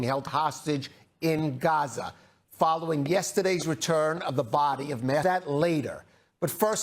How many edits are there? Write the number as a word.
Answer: one